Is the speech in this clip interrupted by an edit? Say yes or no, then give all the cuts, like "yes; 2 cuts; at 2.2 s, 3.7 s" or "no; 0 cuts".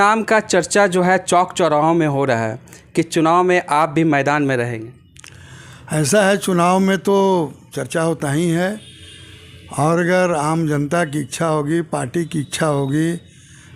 no; 0 cuts